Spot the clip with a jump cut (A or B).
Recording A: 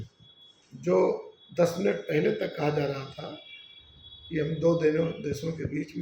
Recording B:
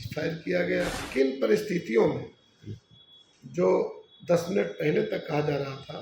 B